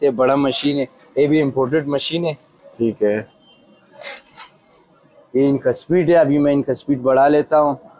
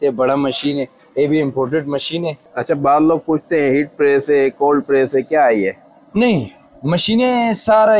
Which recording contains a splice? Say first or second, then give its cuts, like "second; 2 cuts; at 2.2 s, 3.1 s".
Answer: second; 1 cut; at 2.5 s